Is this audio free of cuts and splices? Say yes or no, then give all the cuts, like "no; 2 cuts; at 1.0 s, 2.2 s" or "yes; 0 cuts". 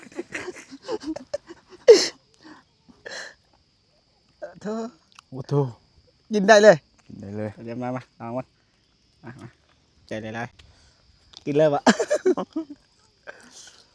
yes; 0 cuts